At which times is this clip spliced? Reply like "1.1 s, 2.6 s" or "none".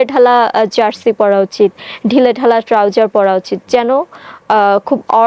none